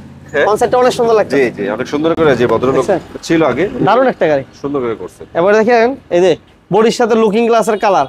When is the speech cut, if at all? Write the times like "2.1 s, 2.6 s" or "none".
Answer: none